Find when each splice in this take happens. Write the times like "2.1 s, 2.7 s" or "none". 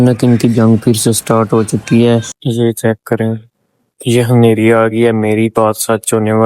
2.4 s